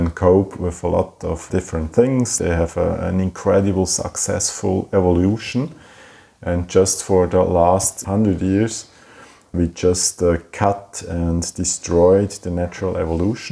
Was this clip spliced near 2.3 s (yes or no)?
yes